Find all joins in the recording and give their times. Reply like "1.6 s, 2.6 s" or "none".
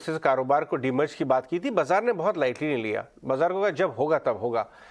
2.2 s